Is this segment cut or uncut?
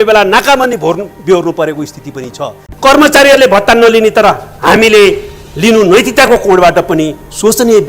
cut